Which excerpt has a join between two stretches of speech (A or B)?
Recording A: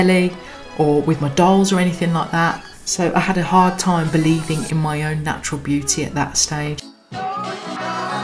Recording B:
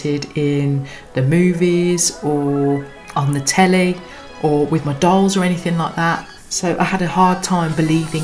A